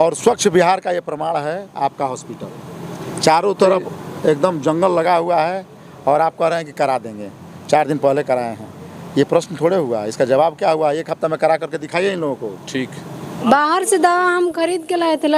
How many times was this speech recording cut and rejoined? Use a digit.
1